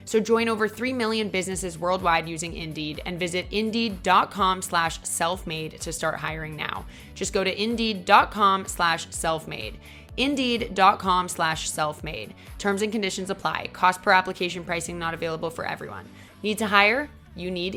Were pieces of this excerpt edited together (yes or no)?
no